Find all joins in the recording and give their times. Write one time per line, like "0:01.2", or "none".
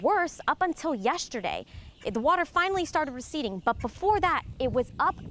none

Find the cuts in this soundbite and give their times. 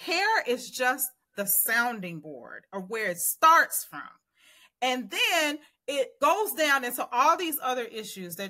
0:06.1

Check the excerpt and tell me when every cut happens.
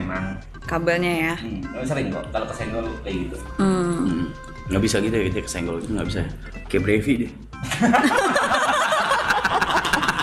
none

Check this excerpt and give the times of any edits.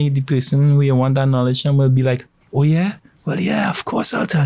none

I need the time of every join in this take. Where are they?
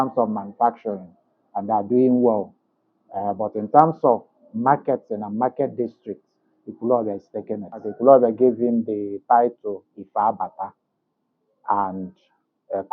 0:07.8

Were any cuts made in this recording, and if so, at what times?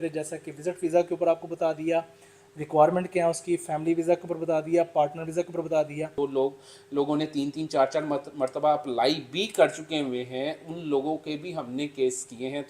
0:06.1

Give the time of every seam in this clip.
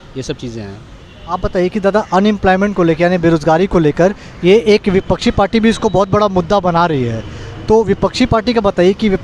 none

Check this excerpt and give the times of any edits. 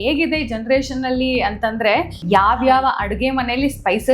0:02.2

